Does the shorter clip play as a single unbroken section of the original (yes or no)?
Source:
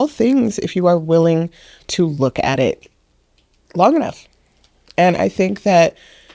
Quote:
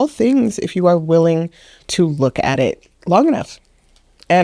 no